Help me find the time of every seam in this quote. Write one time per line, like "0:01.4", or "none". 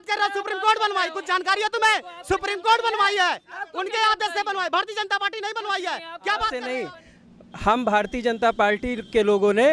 0:06.7